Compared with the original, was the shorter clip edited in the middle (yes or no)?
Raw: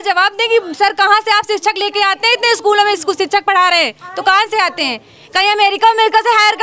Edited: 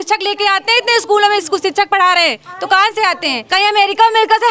yes